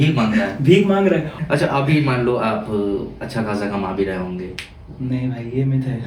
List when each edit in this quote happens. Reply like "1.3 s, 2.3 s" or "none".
1.4 s